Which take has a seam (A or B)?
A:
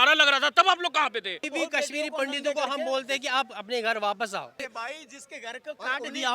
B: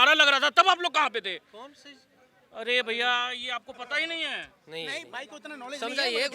A